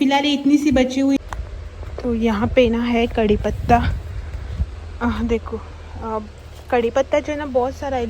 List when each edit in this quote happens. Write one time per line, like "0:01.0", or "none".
0:01.2